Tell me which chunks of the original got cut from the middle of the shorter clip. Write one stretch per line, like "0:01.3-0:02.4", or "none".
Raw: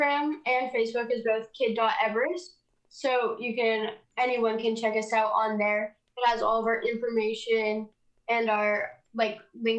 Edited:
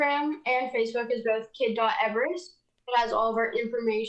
0:02.7-0:06.0